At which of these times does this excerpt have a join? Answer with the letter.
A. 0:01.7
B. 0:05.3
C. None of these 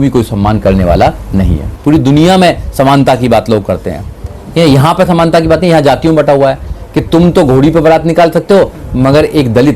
A